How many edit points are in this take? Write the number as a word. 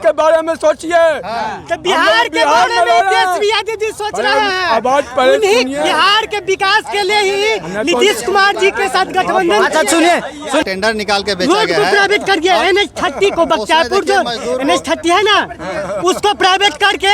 one